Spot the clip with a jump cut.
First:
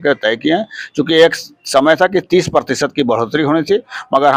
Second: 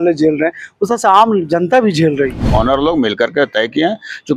second; 1 cut; at 2.4 s

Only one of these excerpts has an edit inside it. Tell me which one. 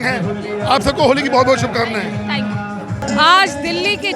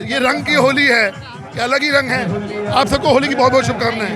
first; 1 cut; at 3.0 s

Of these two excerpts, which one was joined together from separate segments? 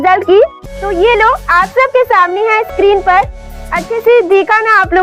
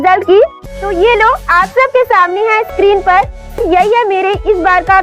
second; 1 cut; at 3.6 s

